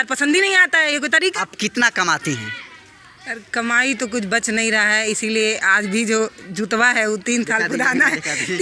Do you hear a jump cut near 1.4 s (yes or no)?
yes